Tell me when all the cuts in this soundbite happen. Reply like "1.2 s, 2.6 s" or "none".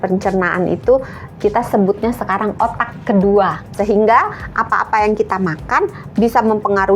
3.7 s

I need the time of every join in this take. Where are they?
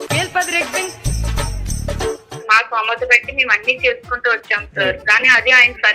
2.3 s

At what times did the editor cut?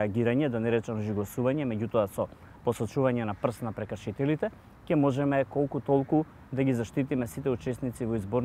none

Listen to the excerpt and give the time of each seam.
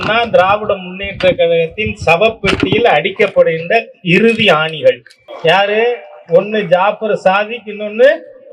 none

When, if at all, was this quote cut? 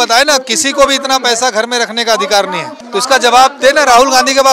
2.7 s

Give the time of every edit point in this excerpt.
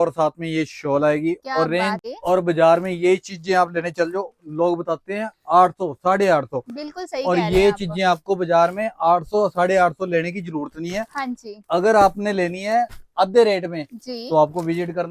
2.0 s

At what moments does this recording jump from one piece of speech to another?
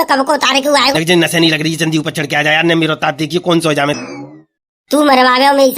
0.9 s, 4.0 s

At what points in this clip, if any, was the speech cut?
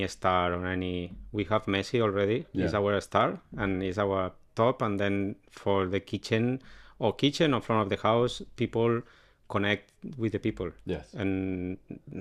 none

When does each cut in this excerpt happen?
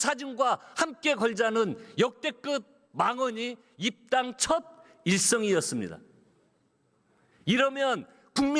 none

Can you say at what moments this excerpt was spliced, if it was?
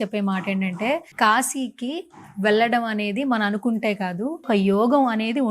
1.1 s, 4.5 s

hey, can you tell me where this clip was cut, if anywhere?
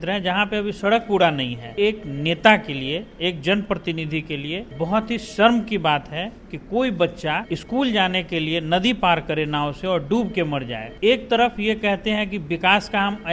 1.8 s, 4.7 s, 7.5 s, 10.9 s

